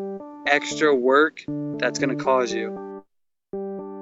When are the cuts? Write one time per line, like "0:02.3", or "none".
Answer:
0:02.5